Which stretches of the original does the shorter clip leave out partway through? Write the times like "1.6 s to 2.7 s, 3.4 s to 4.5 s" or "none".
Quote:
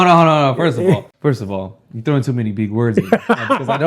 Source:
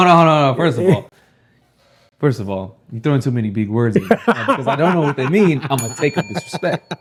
1.1 s to 2.1 s